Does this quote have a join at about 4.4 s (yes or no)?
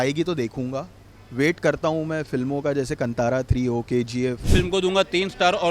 yes